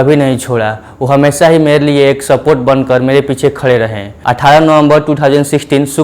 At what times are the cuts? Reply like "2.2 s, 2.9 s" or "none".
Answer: 4.1 s